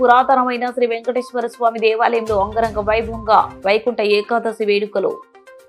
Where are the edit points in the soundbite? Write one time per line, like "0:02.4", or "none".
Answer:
none